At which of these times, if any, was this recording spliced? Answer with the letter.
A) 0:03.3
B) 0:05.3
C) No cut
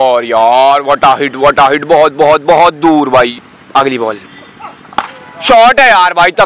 A